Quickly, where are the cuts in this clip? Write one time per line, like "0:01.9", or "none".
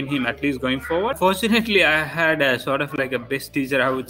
0:01.2